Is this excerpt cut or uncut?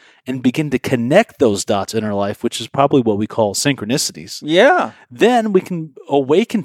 uncut